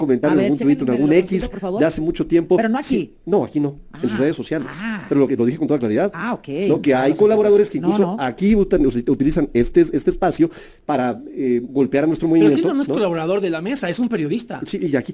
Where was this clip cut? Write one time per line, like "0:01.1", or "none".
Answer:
none